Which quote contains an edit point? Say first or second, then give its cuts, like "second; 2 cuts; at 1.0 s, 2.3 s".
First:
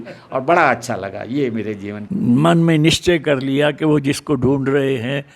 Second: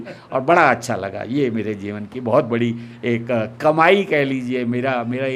first; 1 cut; at 2.0 s